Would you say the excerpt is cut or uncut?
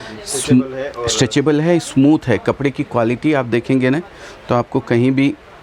uncut